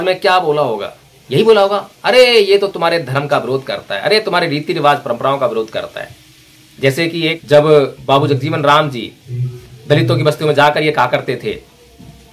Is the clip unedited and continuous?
no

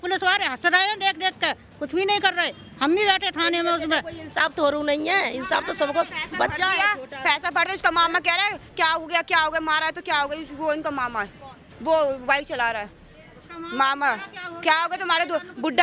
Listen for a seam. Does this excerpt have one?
no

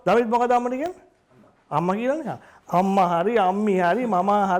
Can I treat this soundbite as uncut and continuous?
no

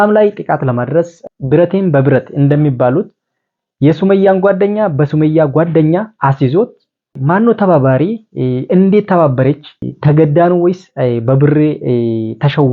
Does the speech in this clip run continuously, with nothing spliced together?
no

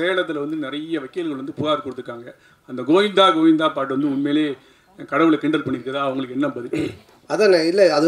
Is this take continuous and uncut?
yes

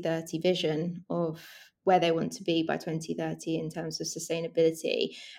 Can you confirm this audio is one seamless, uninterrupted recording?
yes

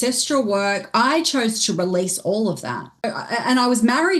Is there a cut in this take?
yes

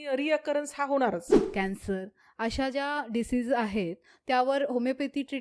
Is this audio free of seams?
no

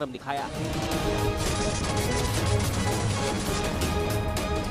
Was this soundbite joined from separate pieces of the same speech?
no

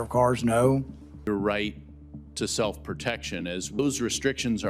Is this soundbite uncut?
yes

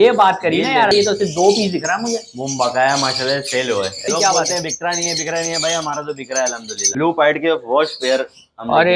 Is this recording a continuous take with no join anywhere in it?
no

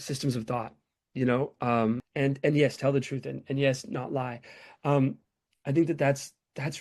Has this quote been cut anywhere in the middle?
yes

